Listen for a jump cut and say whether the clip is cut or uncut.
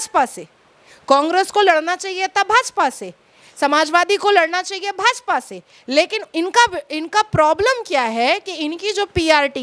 uncut